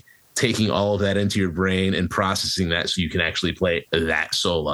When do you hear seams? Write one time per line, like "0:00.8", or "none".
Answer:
none